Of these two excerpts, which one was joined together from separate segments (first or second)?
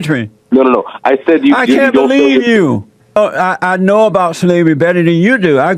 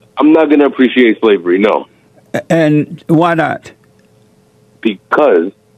first